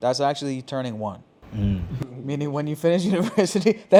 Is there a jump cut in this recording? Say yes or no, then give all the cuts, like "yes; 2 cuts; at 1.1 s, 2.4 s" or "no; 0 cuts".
no; 0 cuts